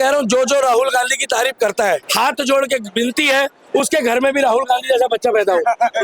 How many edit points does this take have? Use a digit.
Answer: 1